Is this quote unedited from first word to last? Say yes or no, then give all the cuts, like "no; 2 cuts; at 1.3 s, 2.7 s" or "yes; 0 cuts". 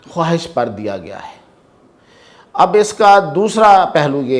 yes; 0 cuts